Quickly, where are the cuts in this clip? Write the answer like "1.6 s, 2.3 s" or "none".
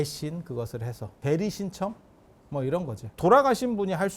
1.2 s, 3.2 s